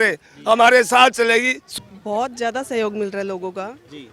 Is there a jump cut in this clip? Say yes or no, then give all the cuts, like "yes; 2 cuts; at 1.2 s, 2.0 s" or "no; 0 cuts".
yes; 1 cut; at 1.6 s